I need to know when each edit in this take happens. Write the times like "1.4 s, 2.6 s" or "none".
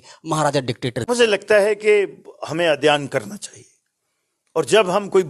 1.0 s